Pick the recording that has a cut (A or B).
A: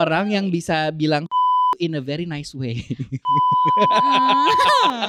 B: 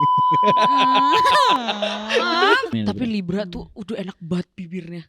B